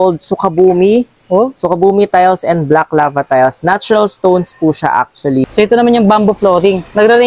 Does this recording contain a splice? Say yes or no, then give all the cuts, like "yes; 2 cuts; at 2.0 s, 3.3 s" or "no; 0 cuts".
yes; 1 cut; at 5.5 s